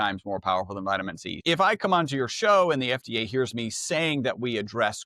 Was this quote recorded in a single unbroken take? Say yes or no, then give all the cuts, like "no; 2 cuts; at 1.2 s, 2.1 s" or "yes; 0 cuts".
no; 1 cut; at 1.4 s